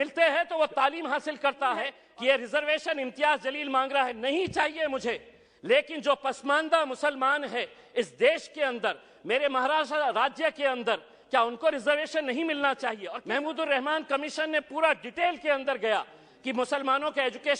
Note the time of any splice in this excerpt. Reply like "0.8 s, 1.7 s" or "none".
2.0 s, 13.1 s